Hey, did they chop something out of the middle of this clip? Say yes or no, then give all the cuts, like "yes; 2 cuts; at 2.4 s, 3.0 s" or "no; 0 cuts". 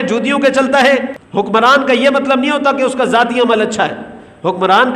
yes; 1 cut; at 1.2 s